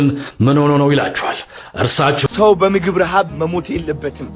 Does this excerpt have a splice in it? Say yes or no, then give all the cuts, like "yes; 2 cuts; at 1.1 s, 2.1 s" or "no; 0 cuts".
yes; 1 cut; at 2.2 s